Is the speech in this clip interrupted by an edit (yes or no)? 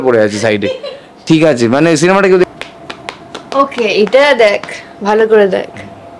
yes